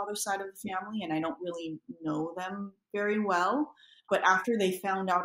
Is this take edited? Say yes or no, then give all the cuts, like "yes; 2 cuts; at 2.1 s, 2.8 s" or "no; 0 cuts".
yes; 1 cut; at 4.0 s